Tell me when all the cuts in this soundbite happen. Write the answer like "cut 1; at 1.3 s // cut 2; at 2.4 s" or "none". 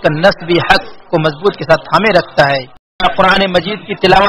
cut 1; at 3.0 s